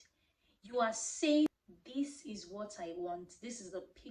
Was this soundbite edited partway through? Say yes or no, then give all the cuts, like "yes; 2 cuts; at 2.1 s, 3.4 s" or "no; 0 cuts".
yes; 1 cut; at 1.5 s